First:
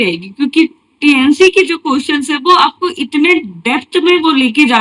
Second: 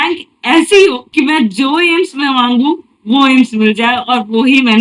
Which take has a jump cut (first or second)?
second